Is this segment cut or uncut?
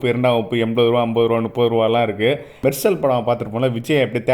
cut